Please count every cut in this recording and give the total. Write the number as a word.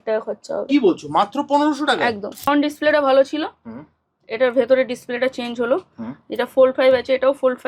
one